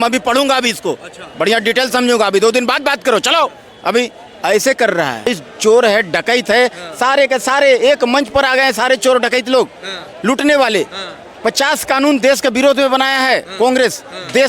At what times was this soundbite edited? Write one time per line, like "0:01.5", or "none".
0:05.2